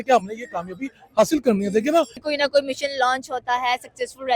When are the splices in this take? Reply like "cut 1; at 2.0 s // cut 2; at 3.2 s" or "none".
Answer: cut 1; at 2.2 s